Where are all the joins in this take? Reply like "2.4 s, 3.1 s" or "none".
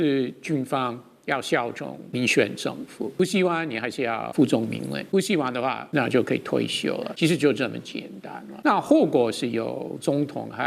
2.0 s, 3.2 s, 4.3 s, 5.0 s, 5.8 s, 7.1 s, 8.5 s